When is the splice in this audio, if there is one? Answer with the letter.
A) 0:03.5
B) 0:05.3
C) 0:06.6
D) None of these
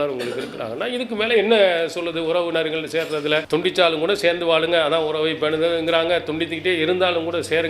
A